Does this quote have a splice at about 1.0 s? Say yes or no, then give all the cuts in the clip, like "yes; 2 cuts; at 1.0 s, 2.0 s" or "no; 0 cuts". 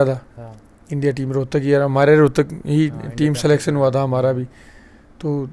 no; 0 cuts